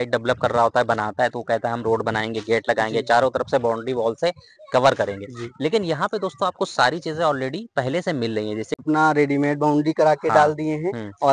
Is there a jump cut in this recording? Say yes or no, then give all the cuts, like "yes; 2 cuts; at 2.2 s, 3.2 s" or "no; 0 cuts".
yes; 1 cut; at 8.8 s